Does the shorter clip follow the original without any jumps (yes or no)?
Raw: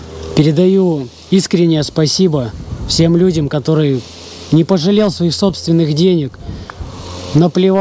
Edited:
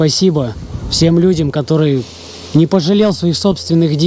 yes